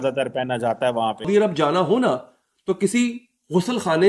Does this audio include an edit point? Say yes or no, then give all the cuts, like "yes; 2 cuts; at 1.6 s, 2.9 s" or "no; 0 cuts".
yes; 1 cut; at 1.3 s